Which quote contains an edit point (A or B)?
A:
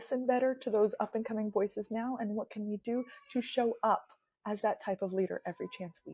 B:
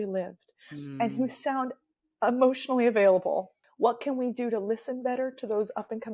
B